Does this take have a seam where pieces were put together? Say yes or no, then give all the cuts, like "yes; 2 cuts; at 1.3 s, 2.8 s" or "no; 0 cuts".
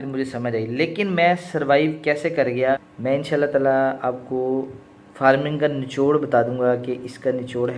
yes; 1 cut; at 2.9 s